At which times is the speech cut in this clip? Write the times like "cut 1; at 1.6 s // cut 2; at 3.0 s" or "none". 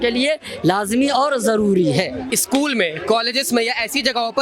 cut 1; at 2.2 s